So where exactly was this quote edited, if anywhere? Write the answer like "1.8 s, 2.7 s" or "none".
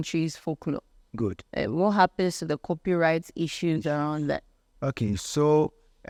none